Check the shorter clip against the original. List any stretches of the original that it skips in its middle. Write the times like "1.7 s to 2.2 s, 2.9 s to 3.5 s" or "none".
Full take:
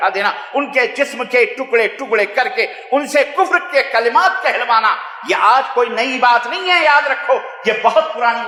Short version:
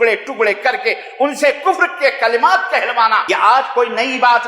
5.0 s to 5.2 s